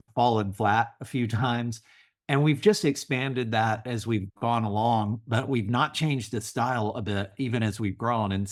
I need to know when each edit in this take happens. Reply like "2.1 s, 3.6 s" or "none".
none